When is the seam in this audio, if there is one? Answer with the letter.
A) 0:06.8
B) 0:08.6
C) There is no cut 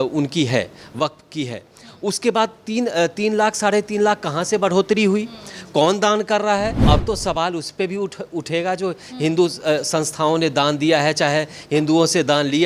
A